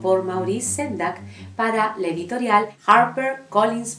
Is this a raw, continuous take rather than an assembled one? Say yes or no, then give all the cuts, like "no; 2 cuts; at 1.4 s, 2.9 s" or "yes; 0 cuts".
no; 1 cut; at 2.7 s